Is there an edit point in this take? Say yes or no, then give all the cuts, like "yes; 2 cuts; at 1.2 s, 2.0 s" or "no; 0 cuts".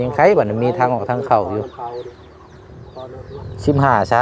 yes; 1 cut; at 3.1 s